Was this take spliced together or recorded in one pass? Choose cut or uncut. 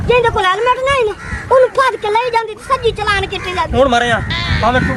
uncut